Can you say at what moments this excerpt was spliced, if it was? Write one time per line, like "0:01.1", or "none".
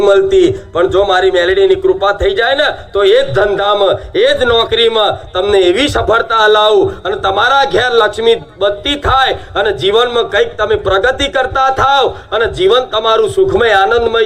none

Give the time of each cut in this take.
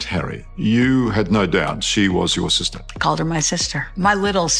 none

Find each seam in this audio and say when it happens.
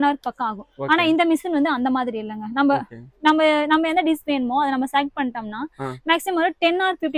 none

